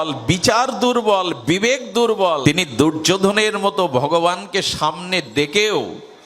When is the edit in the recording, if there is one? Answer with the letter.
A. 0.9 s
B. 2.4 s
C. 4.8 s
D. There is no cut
B